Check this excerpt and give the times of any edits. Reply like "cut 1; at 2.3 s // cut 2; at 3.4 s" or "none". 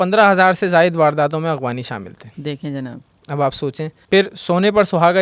cut 1; at 3.9 s